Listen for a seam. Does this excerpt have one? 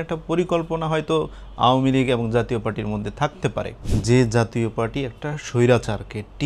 yes; 1 cut; at 3.8 s

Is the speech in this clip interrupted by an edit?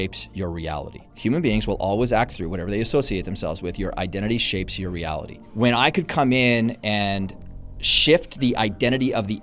yes; 2 cuts; at 1.1 s, 5.4 s

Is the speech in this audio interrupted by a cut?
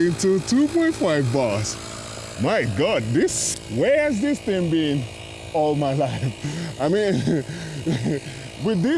no; 0 cuts

